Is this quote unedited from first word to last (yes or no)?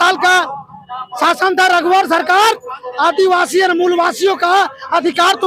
yes